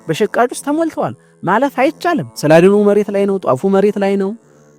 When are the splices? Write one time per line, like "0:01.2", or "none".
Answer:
none